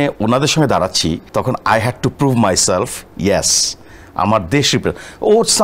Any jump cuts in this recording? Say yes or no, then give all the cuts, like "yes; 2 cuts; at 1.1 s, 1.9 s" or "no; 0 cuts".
yes; 1 cut; at 1.2 s